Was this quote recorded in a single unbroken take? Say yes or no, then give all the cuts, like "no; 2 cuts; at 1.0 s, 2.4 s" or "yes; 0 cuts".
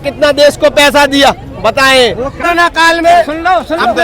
no; 1 cut; at 2.4 s